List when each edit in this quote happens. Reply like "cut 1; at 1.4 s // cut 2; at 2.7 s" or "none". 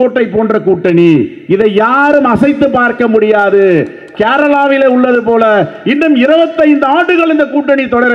none